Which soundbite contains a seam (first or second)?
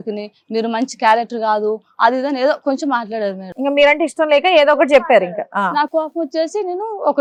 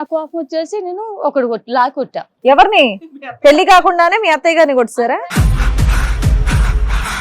second